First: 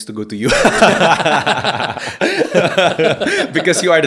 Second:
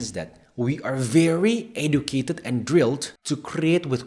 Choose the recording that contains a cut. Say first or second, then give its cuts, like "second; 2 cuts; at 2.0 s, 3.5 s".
second; 1 cut; at 3.1 s